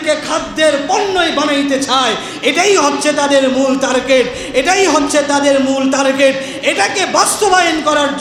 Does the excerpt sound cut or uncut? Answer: uncut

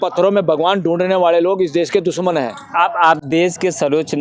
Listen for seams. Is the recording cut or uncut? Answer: uncut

